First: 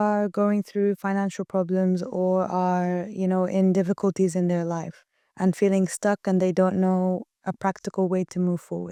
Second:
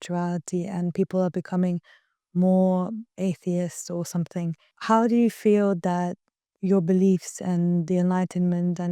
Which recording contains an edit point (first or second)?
second